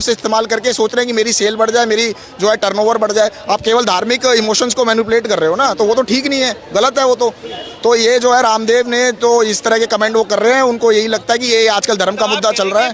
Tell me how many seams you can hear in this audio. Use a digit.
0